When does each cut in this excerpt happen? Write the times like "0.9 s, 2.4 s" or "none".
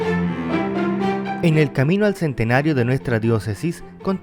1.4 s